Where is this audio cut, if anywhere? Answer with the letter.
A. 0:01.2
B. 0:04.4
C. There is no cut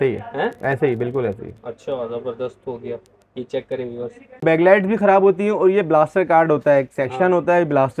B